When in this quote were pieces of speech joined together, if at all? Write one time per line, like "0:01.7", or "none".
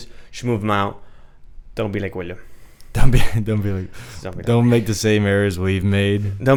none